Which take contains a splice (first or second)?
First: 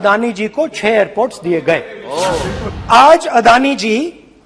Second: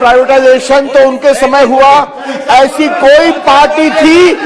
first